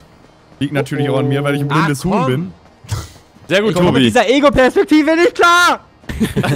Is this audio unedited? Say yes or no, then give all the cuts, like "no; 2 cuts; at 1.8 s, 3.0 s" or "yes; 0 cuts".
yes; 0 cuts